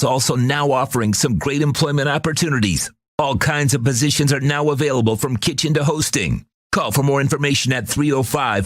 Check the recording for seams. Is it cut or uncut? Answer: uncut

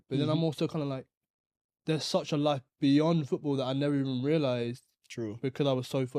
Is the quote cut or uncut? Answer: uncut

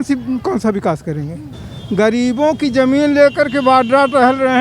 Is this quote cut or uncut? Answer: cut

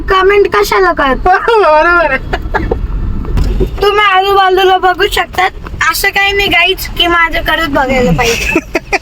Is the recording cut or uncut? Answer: cut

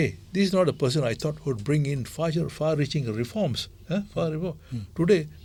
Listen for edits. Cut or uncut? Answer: uncut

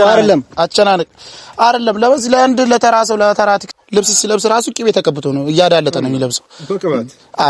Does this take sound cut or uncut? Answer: cut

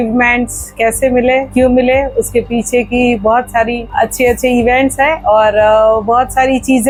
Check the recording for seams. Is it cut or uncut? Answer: uncut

